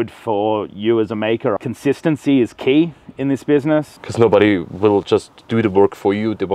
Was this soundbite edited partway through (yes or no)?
yes